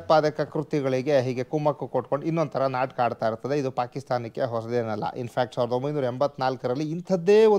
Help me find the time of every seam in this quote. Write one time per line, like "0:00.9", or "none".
none